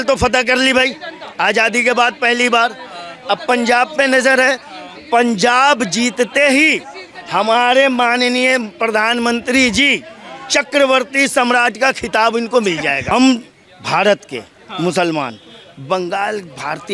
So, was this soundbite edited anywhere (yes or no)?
yes